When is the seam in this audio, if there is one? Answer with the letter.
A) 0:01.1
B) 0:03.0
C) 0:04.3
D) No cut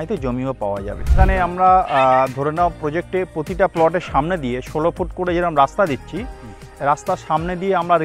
A